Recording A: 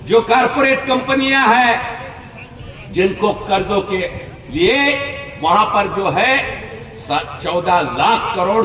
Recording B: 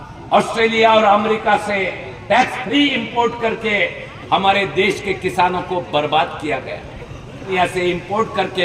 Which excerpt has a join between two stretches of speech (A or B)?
B